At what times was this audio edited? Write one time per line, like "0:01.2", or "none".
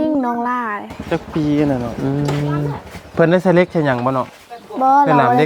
0:01.9